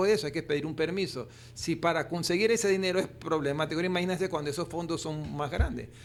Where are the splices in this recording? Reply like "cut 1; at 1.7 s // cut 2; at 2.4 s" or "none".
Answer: none